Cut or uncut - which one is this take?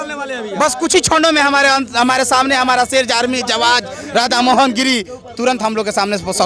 uncut